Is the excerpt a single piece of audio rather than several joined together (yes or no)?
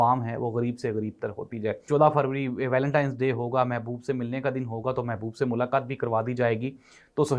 no